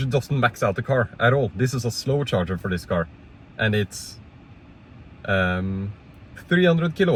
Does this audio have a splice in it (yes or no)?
no